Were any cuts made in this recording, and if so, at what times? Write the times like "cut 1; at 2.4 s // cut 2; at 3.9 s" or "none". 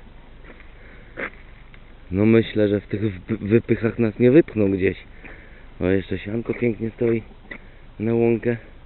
none